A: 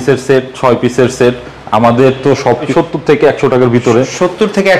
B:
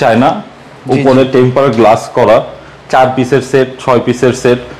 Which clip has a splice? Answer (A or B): A